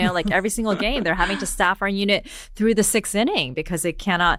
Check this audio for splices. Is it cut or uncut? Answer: uncut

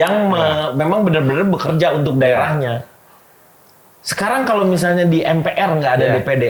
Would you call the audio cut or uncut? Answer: uncut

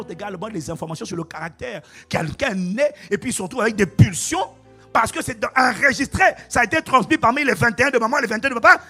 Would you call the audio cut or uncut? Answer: uncut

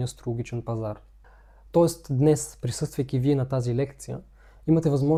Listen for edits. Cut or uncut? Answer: uncut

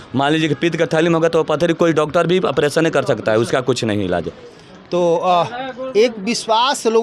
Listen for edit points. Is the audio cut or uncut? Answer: uncut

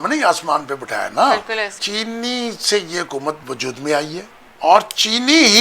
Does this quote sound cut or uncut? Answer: cut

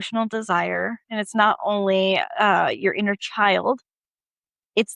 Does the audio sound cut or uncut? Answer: uncut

